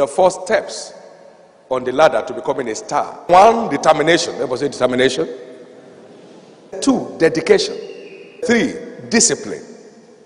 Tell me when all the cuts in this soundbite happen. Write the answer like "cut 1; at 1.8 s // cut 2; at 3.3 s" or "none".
cut 1; at 3.3 s // cut 2; at 6.8 s // cut 3; at 8.4 s

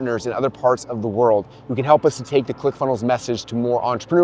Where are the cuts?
none

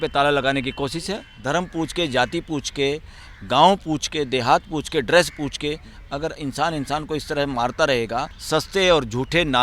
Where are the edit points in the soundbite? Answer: cut 1; at 1.3 s // cut 2; at 8.4 s

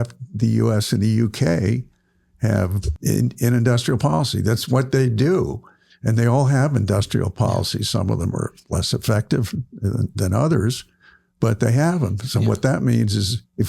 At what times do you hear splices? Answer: cut 1; at 2.9 s

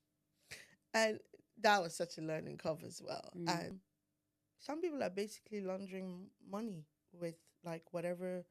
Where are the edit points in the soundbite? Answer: cut 1; at 3.9 s

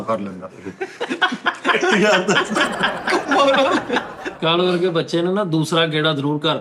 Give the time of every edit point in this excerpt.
cut 1; at 4.3 s

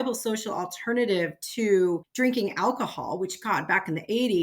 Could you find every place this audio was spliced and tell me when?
cut 1; at 2.1 s

